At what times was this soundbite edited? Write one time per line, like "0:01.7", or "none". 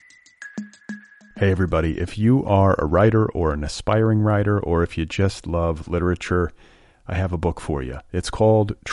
0:00.9